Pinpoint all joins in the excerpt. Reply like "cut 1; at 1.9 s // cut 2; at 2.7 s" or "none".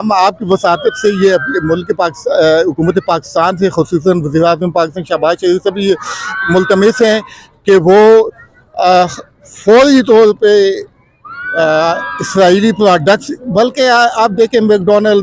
none